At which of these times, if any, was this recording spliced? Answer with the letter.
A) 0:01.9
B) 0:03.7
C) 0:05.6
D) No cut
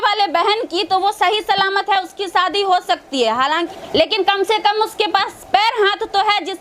B